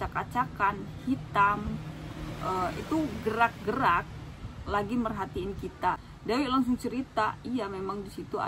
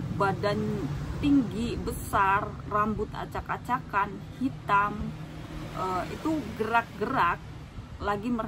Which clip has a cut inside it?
first; 1 cut; at 6.1 s

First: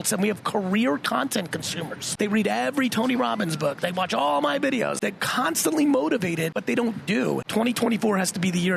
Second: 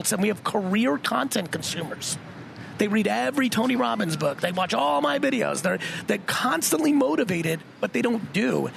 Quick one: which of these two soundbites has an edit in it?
first; 4 cuts; at 2.0 s, 4.9 s, 6.5 s, 7.4 s

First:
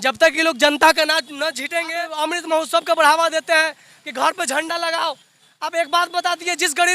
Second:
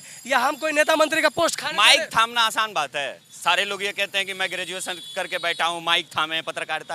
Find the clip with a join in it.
first; 1 cut; at 1.9 s

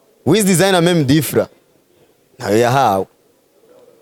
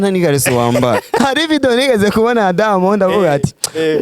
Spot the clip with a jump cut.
second; 1 cut; at 1.2 s

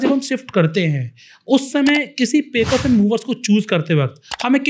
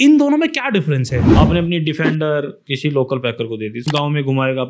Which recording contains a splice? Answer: second; 3 cuts; at 1.2 s, 2.6 s, 3.8 s

